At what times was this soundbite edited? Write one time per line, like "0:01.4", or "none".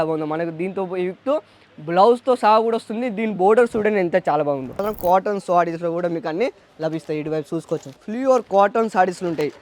0:04.9
0:07.9